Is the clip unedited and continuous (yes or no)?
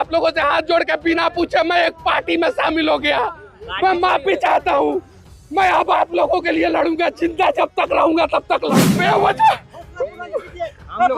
no